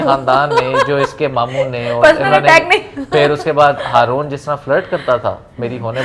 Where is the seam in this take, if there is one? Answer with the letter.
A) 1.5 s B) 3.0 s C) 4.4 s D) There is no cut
D